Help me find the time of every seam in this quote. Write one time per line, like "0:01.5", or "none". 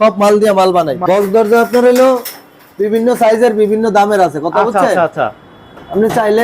0:01.0